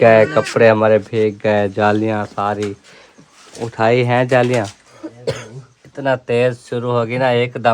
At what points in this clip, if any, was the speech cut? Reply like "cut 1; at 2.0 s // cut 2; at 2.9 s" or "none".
cut 1; at 5.0 s